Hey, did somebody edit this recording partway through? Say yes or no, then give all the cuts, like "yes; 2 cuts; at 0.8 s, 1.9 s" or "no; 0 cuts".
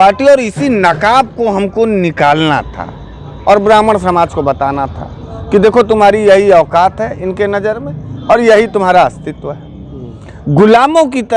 no; 0 cuts